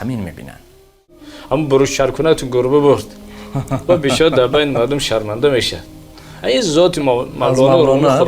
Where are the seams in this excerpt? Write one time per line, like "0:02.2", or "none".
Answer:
0:01.3